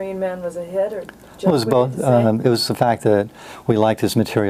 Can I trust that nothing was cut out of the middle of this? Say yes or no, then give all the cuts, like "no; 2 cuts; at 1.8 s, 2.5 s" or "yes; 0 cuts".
yes; 0 cuts